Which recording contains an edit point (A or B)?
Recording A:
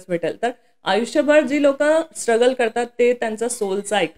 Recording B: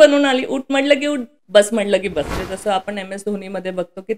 B